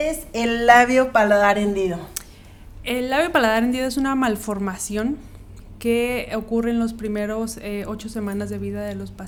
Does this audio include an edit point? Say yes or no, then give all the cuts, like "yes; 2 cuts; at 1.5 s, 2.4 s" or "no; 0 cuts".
no; 0 cuts